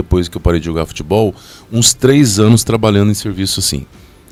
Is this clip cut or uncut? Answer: uncut